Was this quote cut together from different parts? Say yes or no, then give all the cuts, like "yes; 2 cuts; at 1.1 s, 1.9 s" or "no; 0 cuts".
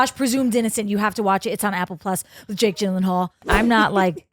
yes; 1 cut; at 3.4 s